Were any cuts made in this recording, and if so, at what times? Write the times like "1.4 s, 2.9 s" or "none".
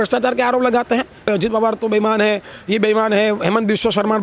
1.2 s

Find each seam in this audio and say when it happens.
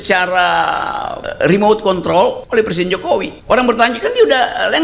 1.3 s, 2.4 s, 3.3 s

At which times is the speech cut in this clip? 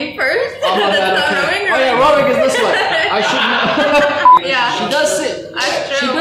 4.3 s

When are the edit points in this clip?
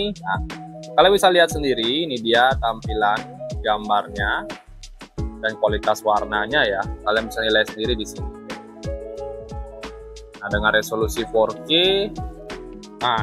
8.1 s, 10.4 s

